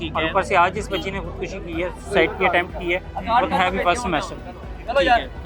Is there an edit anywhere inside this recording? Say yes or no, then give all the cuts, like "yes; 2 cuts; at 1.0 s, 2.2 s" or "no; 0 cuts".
no; 0 cuts